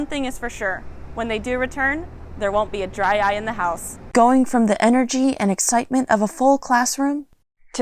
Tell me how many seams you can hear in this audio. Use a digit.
1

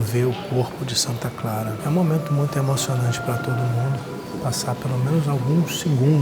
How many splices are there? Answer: 2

